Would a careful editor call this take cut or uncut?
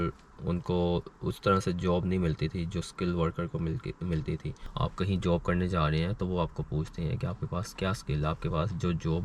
cut